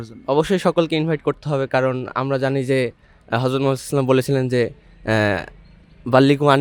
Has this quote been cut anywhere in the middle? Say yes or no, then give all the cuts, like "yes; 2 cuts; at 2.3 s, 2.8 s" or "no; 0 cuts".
no; 0 cuts